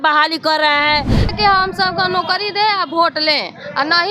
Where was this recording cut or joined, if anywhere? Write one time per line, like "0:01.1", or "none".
0:01.3